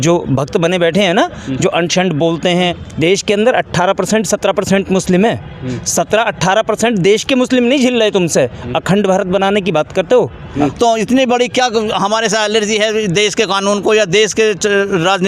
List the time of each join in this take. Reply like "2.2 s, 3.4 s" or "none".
2.8 s, 10.4 s

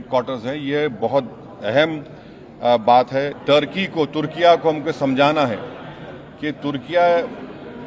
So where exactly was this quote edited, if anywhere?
3.4 s

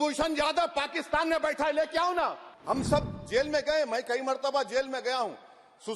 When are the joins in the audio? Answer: 2.5 s

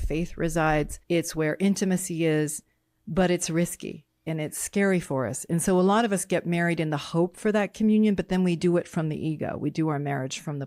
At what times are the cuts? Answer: 1.0 s

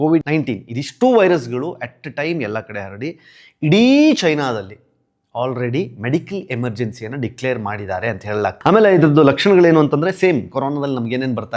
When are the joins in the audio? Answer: 8.5 s

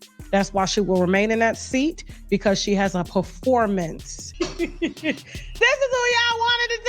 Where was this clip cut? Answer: 4.3 s

